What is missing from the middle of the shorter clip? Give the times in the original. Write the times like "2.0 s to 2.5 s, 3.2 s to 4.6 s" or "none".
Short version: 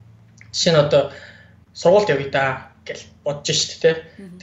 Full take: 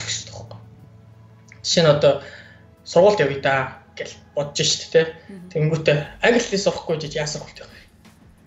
none